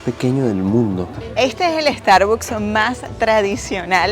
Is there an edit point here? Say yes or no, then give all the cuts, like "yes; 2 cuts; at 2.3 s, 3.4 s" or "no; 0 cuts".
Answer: yes; 1 cut; at 1.2 s